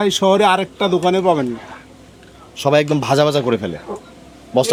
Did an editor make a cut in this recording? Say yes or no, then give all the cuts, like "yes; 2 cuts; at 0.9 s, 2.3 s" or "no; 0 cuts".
no; 0 cuts